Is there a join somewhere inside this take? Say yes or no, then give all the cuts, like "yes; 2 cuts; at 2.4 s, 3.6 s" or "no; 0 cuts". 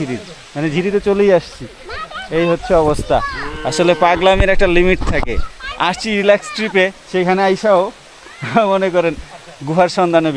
no; 0 cuts